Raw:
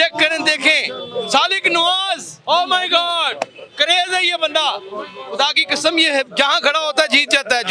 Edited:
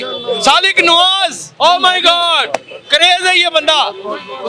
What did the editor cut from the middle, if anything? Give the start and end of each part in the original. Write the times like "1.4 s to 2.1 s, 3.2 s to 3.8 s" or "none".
none